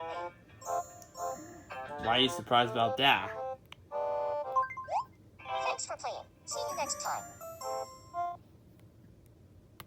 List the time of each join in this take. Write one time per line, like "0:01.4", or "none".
none